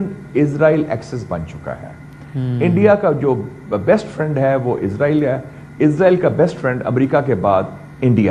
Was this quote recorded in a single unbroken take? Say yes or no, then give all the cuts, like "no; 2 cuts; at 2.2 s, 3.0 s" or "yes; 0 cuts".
yes; 0 cuts